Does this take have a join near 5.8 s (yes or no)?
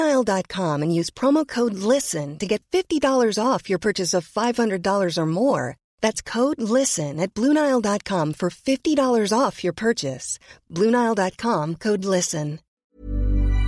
no